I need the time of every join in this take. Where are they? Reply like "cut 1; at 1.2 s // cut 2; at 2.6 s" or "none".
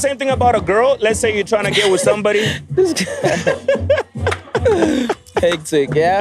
none